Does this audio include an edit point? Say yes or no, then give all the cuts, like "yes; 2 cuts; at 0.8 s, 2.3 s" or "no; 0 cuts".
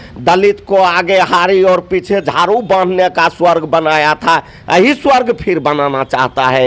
no; 0 cuts